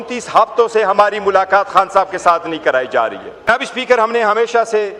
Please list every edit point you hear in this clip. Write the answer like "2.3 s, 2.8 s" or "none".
3.5 s